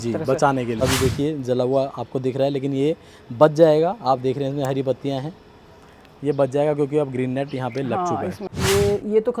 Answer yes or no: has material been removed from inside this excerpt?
yes